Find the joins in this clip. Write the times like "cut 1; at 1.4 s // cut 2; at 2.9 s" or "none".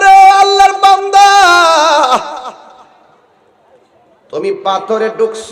none